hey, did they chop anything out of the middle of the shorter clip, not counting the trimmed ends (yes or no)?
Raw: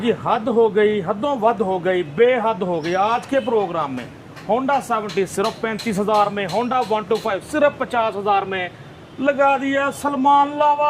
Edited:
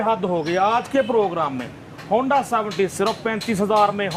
no